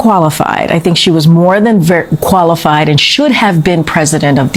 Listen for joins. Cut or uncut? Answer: uncut